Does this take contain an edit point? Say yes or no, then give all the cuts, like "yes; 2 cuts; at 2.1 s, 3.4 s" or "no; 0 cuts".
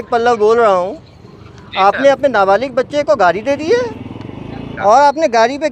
yes; 1 cut; at 4.7 s